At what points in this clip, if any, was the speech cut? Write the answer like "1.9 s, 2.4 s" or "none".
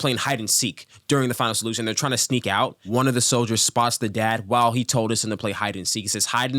2.8 s